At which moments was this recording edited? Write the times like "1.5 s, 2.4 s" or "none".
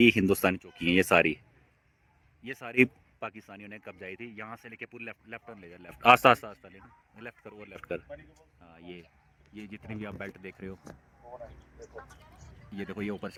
none